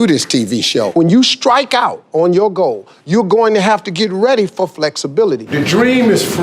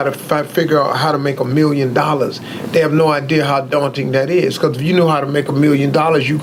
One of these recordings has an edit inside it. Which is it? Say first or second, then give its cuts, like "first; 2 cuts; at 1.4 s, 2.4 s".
first; 2 cuts; at 0.9 s, 5.5 s